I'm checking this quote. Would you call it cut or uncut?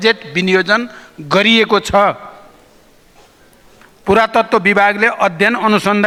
uncut